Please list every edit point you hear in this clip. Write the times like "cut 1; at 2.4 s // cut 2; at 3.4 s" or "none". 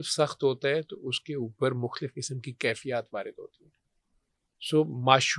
cut 1; at 4.5 s